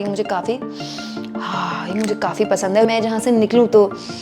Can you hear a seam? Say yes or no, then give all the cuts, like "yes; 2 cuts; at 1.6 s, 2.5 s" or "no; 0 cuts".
yes; 1 cut; at 2.9 s